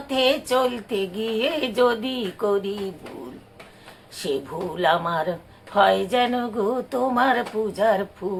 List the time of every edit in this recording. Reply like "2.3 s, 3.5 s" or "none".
none

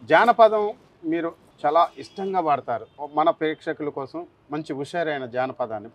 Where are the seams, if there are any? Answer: 1.4 s, 2.9 s

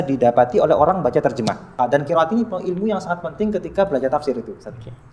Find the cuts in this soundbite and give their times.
1.8 s

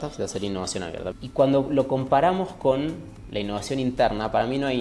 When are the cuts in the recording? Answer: 1.0 s

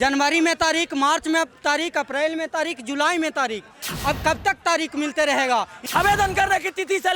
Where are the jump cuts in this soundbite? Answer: 5.8 s

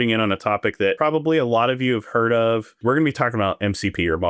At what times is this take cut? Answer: 1.0 s, 2.8 s

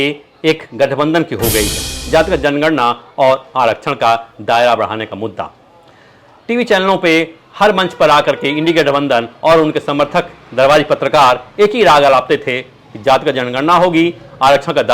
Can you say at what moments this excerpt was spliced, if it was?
2.0 s

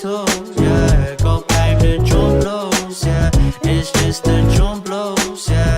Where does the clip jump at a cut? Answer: 1.5 s

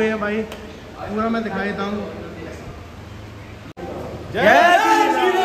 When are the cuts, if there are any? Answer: 3.8 s

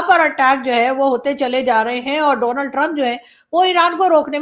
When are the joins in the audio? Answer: none

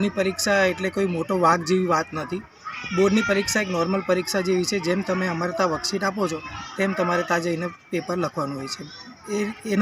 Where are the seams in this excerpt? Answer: none

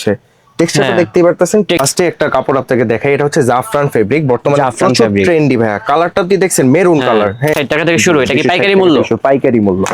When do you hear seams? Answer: 1.8 s, 7.5 s

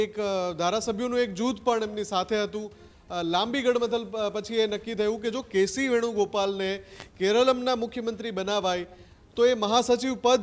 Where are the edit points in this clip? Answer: none

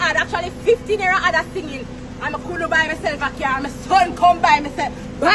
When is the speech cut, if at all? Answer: none

